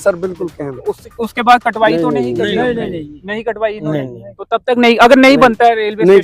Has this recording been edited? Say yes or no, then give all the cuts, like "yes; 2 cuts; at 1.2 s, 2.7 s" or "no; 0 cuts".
no; 0 cuts